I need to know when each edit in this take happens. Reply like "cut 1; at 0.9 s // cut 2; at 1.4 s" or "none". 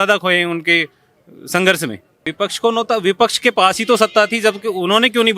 cut 1; at 2.2 s